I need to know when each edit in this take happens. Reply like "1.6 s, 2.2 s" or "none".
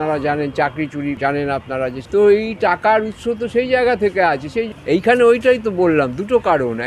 1.2 s, 2.0 s, 4.7 s